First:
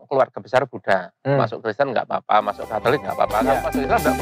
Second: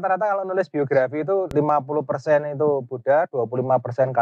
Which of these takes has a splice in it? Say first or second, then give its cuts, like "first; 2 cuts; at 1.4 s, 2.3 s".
second; 1 cut; at 1.5 s